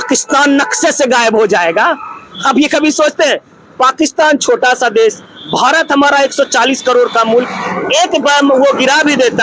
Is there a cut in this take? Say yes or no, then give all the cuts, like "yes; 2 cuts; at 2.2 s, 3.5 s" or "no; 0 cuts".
no; 0 cuts